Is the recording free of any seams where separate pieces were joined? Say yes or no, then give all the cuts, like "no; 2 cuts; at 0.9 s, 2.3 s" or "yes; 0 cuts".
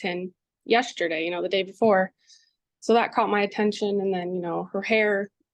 yes; 0 cuts